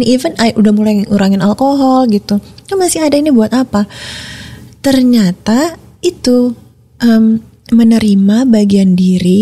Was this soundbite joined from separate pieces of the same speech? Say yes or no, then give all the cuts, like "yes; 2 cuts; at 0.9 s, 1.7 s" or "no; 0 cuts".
no; 0 cuts